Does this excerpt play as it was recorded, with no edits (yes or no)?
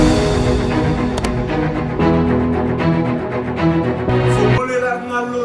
yes